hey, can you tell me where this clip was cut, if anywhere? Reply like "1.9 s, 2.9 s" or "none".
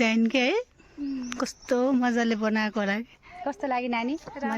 3.1 s